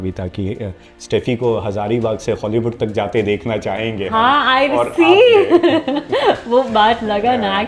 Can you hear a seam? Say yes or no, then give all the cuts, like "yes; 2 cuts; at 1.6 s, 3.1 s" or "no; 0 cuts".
no; 0 cuts